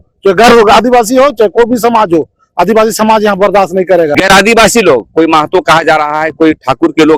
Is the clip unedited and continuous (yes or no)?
no